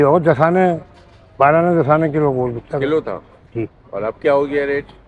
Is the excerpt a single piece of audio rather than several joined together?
yes; 0 cuts

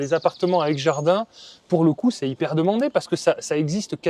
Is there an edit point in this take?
no; 0 cuts

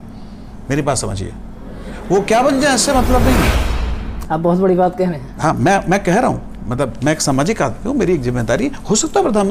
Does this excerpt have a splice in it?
no; 0 cuts

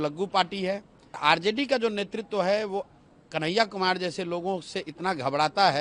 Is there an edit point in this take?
yes; 1 cut; at 1.2 s

